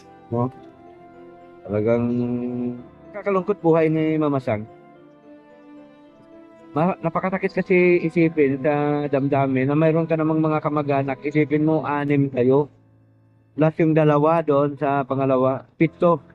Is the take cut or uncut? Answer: cut